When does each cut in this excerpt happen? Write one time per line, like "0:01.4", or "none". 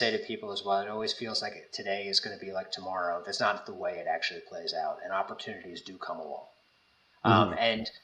none